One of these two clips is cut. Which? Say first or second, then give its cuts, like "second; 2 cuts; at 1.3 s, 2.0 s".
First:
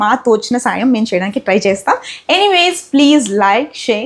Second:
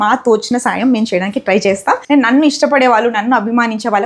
second; 1 cut; at 2.0 s